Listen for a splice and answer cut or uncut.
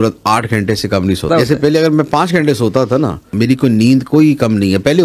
cut